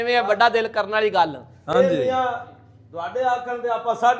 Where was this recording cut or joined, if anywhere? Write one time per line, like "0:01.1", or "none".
none